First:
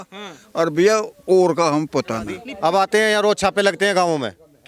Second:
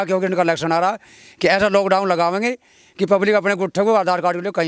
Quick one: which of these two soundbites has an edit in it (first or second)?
first